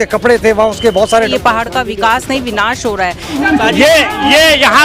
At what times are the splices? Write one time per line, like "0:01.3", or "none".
0:01.3
0:03.3